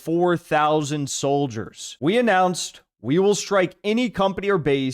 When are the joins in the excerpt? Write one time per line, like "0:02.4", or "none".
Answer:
0:01.9